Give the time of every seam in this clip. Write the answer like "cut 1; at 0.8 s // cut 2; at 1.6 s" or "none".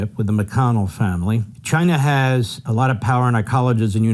cut 1; at 1.5 s // cut 2; at 2.6 s